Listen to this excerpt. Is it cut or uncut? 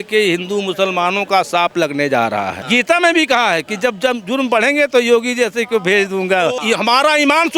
cut